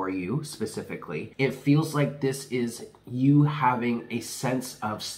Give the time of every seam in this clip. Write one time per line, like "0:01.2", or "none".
0:01.3